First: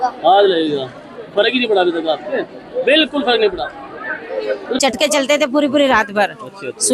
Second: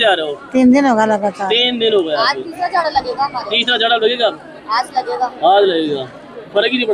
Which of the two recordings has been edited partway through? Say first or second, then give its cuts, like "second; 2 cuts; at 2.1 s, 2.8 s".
first; 1 cut; at 4.8 s